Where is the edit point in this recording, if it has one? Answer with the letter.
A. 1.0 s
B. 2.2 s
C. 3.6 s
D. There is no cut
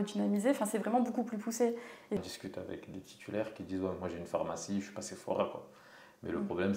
B